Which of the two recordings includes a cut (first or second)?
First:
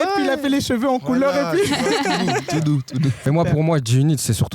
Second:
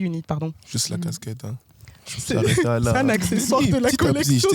first